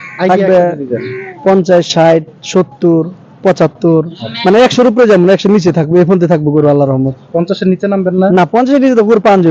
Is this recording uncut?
yes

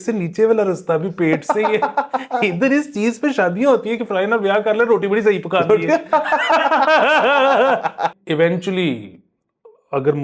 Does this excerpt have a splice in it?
yes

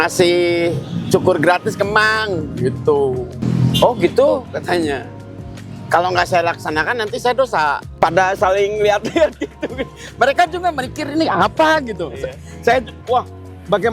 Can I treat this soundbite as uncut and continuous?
no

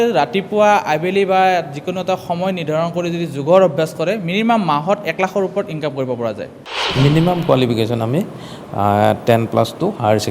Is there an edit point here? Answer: yes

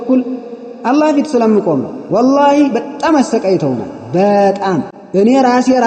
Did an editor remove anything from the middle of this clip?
yes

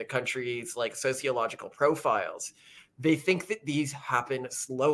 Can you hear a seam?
no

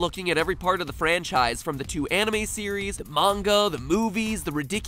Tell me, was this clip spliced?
no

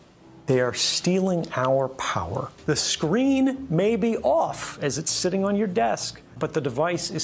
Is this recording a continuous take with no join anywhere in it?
no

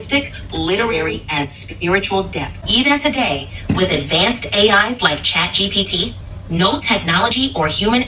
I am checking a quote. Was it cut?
no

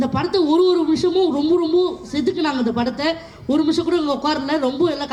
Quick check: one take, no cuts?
yes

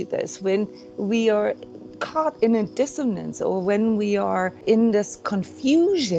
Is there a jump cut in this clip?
yes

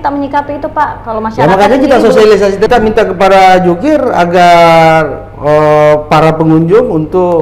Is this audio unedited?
no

